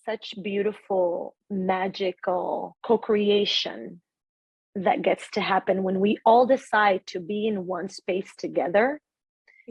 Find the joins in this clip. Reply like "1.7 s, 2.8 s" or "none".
1.4 s, 2.7 s